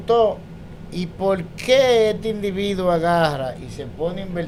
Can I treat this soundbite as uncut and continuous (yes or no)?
yes